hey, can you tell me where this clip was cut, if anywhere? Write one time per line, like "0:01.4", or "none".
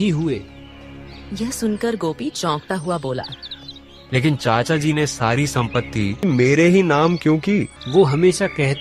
0:06.2
0:07.8